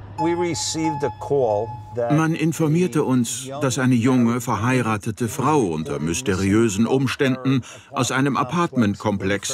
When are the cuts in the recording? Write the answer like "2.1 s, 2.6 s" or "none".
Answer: 5.0 s